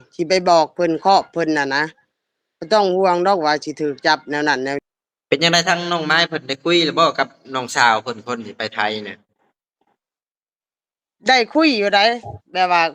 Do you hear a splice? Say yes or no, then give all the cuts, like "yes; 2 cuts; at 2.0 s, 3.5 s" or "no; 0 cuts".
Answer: yes; 1 cut; at 4.8 s